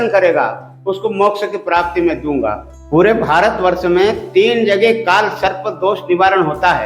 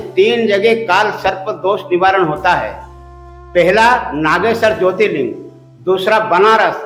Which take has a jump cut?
first; 1 cut; at 2.7 s

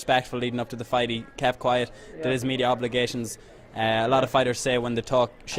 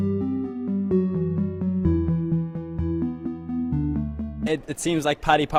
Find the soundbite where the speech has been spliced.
first; 1 cut; at 1.7 s

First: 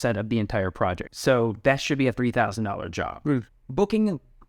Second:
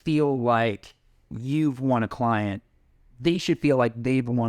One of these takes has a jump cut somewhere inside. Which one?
first; 2 cuts; at 1.0 s, 3.5 s

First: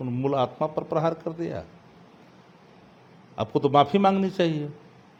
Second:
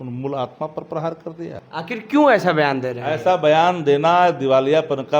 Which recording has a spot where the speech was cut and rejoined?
second; 1 cut; at 1.6 s

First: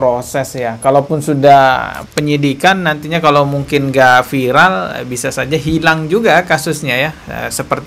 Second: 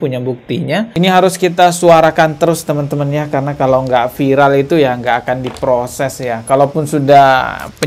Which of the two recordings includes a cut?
second; 1 cut; at 0.9 s

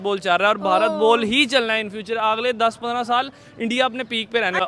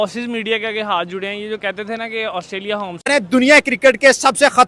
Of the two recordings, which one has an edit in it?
second; 1 cut; at 2.9 s

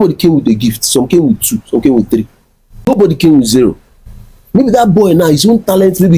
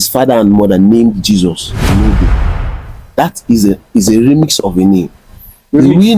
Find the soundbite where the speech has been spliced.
first; 1 cut; at 2.9 s

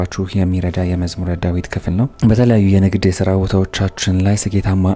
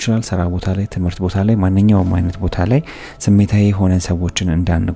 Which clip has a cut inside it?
first; 1 cut; at 2.1 s

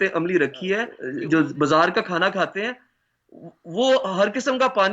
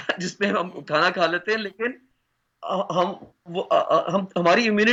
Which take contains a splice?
first; 1 cut; at 1.0 s

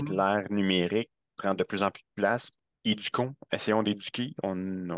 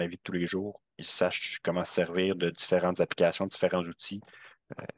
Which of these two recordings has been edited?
first; 1 cut; at 2.6 s

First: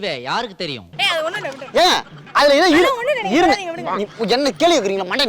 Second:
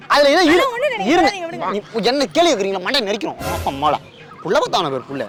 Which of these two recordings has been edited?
first; 1 cut; at 0.9 s

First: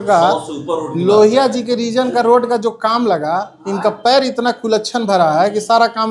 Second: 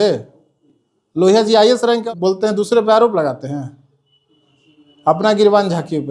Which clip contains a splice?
second; 1 cut; at 2.0 s

